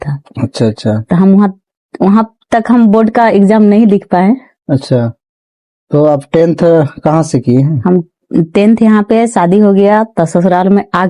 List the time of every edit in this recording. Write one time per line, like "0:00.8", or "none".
none